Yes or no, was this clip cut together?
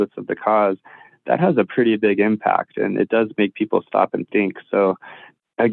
no